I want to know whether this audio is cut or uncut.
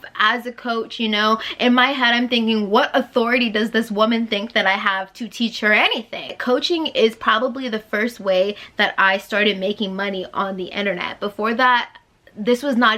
cut